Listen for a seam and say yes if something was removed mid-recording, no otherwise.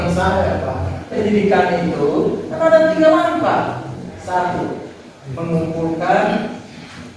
yes